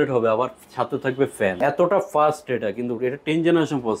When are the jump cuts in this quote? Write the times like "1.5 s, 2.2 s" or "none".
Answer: 1.6 s